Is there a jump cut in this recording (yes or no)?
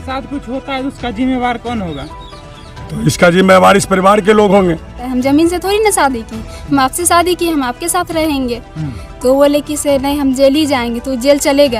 yes